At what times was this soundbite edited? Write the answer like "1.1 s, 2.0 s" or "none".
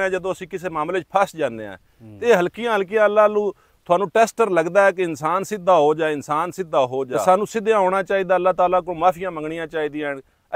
7.1 s